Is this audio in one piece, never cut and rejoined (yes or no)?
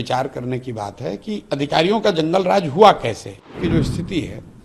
no